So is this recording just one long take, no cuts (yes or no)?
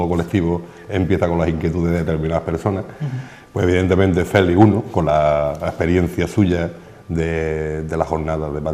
yes